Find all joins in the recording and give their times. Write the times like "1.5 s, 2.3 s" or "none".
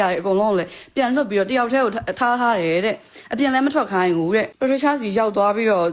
4.5 s

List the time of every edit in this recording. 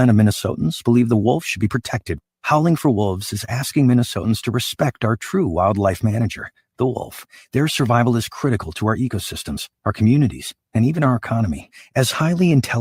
none

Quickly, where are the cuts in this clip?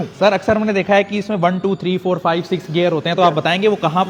none

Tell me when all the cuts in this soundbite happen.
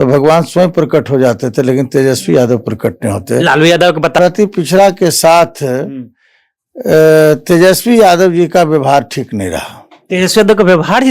4.2 s

